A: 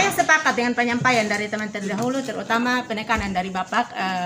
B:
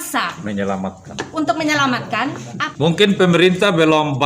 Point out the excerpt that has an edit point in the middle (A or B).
B